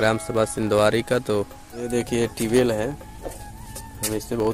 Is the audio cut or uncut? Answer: cut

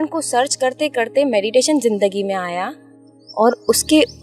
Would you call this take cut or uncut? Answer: uncut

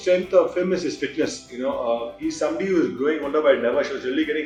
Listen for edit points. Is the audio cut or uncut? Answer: uncut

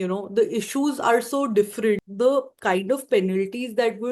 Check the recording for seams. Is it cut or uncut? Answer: cut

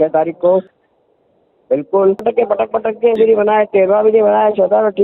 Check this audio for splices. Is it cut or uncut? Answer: uncut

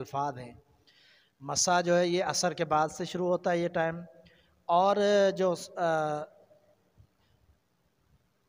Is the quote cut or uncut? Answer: uncut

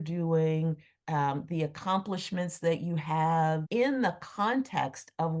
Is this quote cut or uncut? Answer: cut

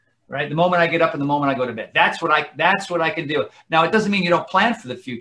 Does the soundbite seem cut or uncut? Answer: uncut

